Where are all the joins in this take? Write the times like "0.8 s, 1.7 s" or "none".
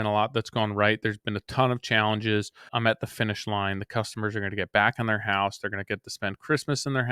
2.7 s